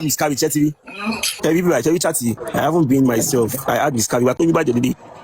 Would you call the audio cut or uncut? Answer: cut